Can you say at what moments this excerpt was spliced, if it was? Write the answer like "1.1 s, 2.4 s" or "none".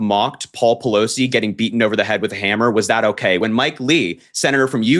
3.4 s